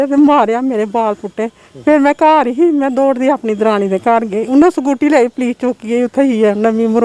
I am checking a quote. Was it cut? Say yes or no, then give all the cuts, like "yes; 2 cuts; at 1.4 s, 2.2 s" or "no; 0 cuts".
no; 0 cuts